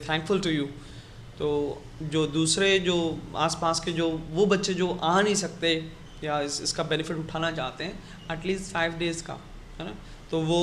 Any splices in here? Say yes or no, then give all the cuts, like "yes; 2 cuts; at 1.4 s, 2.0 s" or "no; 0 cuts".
no; 0 cuts